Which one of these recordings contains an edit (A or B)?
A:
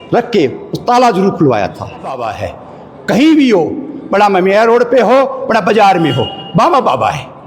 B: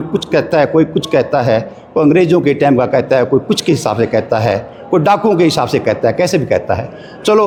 A